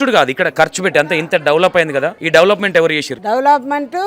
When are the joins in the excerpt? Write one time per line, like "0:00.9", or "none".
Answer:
0:02.2
0:03.1